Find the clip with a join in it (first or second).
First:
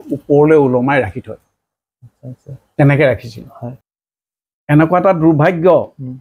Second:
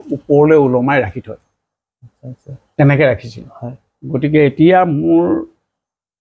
first